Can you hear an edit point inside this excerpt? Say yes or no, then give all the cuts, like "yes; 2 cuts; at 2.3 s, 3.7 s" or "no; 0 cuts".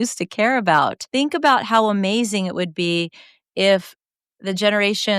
yes; 1 cut; at 1.0 s